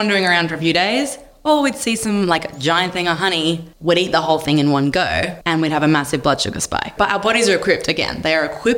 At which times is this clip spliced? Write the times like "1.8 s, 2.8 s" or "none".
3.7 s, 5.3 s, 6.9 s